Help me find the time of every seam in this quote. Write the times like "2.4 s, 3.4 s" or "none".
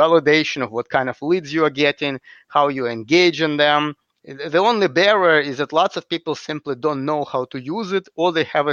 none